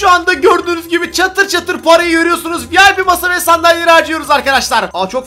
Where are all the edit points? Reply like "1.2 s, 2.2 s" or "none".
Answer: none